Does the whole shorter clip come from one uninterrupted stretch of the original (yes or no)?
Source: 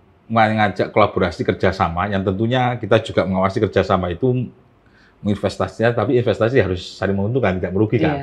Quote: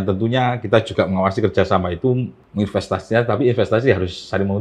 no